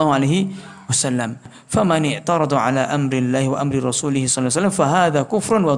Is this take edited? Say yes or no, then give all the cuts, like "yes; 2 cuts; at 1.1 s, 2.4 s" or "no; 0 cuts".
yes; 1 cut; at 1.5 s